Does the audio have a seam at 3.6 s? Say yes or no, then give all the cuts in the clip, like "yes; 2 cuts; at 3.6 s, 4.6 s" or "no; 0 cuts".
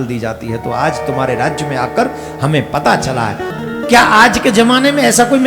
yes; 1 cut; at 3.6 s